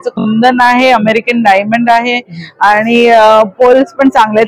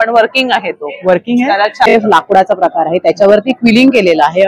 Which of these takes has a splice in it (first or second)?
second